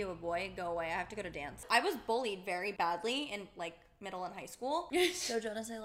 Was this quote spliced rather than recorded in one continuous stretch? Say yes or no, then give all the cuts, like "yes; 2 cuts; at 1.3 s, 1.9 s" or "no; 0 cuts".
yes; 3 cuts; at 1.6 s, 2.7 s, 4.9 s